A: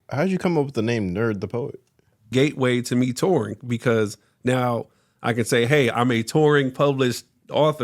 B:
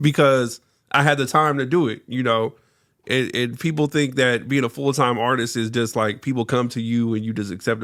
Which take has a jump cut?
A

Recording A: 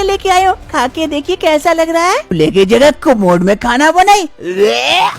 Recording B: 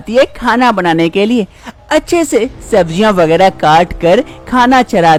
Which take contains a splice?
A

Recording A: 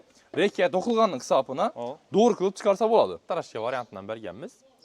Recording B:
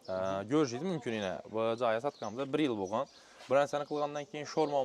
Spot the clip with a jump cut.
A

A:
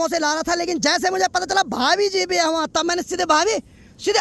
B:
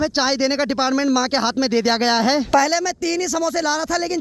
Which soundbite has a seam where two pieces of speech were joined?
B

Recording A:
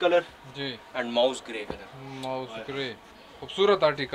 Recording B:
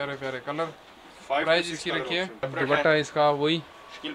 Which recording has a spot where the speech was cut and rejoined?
B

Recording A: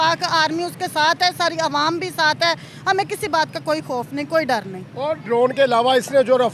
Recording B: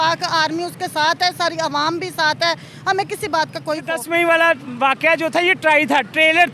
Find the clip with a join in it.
B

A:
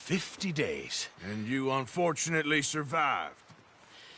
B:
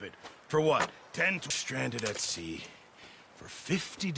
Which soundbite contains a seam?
B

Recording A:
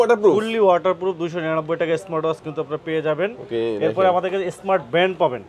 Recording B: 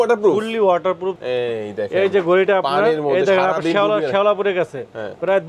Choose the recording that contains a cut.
B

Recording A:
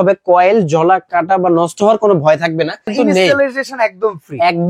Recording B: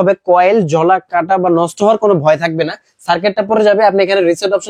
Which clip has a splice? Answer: A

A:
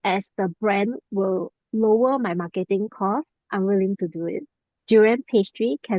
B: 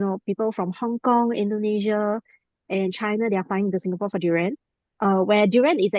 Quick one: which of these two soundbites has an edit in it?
A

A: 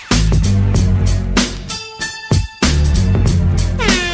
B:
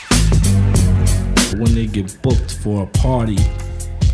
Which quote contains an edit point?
A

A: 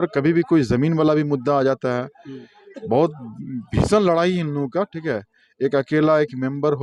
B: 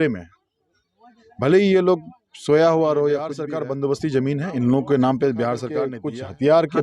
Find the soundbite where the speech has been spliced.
B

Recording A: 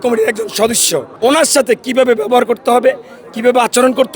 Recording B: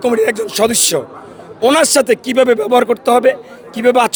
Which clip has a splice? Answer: A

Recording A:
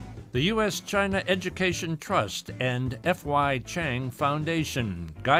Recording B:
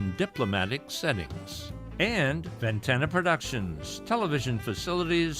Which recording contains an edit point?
B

